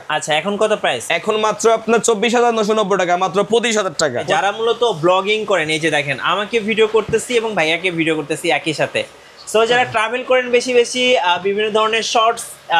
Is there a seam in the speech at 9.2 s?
no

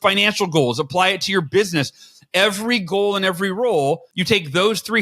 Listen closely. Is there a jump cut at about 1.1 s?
no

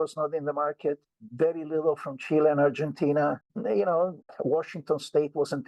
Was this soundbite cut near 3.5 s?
yes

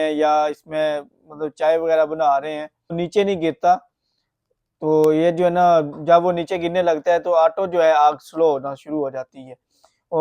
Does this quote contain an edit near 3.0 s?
yes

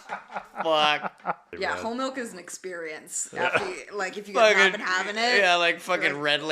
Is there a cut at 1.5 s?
yes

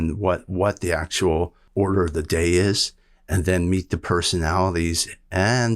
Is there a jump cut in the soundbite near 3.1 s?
no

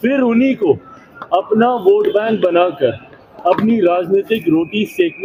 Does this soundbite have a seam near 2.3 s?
no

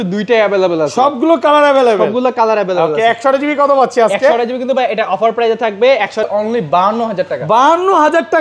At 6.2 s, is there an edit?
yes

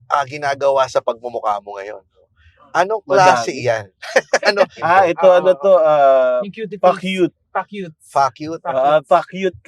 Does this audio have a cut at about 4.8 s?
yes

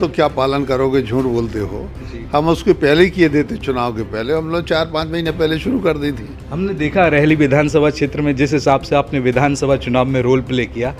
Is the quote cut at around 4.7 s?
no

